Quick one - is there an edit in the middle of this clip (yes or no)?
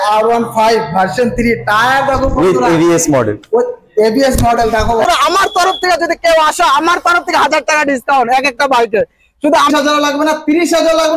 yes